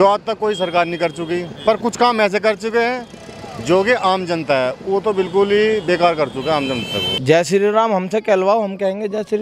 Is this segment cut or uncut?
cut